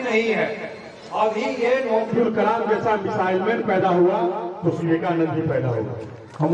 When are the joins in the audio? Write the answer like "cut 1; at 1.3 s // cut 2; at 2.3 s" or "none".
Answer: cut 1; at 2.1 s // cut 2; at 4.8 s